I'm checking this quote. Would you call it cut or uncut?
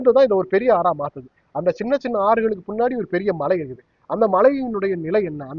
uncut